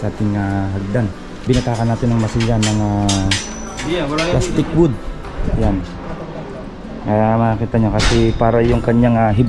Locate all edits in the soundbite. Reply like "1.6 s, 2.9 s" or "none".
1.4 s